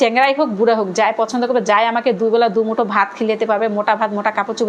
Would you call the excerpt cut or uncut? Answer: uncut